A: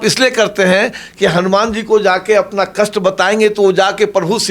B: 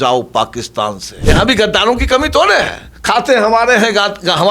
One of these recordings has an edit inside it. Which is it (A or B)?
B